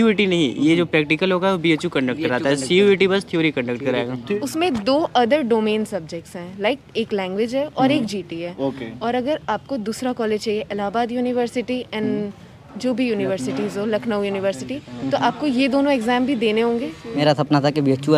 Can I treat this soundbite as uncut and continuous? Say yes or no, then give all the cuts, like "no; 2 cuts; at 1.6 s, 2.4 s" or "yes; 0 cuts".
no; 2 cuts; at 4.3 s, 17.2 s